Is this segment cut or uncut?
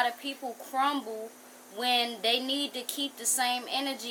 uncut